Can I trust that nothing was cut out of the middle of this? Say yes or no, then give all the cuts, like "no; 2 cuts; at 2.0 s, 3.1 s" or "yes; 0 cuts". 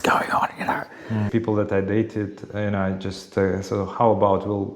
no; 1 cut; at 1.3 s